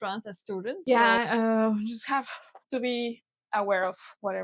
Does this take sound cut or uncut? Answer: cut